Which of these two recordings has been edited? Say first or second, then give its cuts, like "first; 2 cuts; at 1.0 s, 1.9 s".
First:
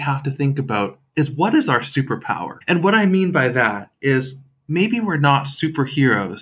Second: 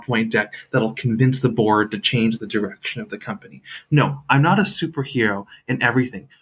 first; 3 cuts; at 1.0 s, 2.5 s, 4.5 s